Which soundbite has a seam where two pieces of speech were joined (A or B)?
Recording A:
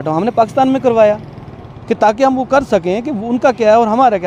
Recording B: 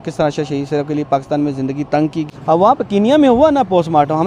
B